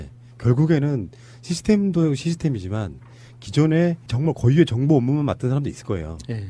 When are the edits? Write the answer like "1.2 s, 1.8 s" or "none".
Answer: none